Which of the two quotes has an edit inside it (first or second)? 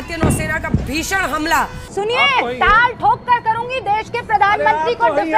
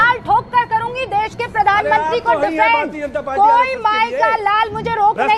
first